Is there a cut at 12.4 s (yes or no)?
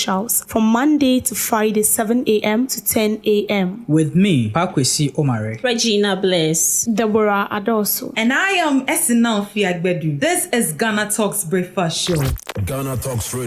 yes